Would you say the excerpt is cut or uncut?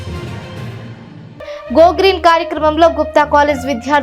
cut